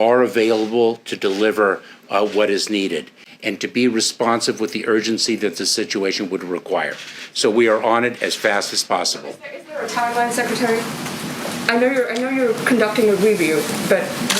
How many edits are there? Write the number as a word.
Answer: one